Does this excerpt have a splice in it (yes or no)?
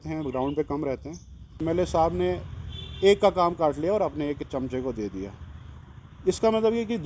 yes